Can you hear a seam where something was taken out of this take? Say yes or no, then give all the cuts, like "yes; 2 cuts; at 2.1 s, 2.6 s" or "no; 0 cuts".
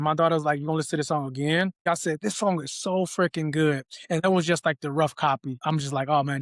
yes; 2 cuts; at 1.9 s, 5.5 s